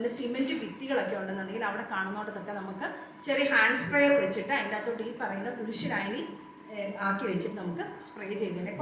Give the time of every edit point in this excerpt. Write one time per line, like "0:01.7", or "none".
none